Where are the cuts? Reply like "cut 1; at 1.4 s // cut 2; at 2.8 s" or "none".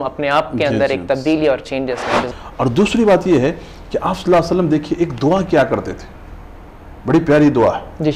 cut 1; at 2.2 s

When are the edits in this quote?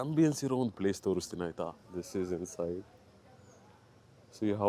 cut 1; at 1.8 s

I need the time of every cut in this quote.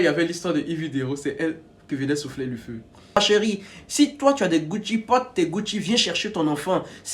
cut 1; at 3.2 s

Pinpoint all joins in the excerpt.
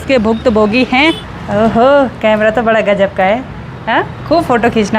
cut 1; at 1.3 s

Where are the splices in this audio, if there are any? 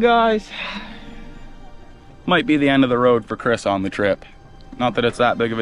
none

